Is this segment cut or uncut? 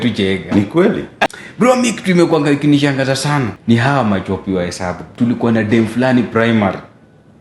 cut